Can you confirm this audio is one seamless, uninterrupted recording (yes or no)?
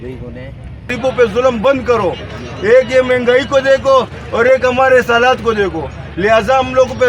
no